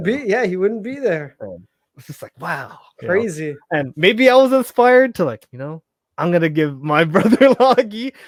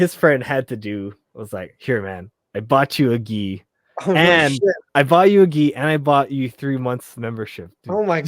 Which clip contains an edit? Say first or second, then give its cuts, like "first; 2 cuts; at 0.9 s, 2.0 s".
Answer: second; 1 cut; at 4.8 s